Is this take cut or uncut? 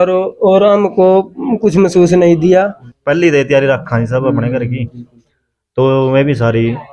cut